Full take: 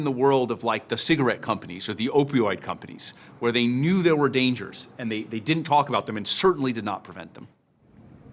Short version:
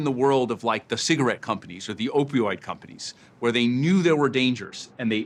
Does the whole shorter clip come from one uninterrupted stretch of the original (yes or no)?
yes